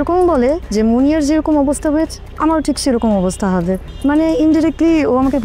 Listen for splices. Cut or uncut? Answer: uncut